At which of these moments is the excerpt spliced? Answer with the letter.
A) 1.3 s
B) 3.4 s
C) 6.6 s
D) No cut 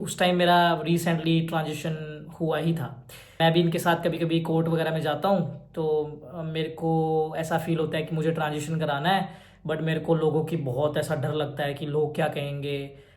B